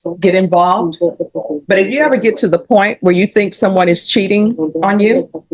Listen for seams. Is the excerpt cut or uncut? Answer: uncut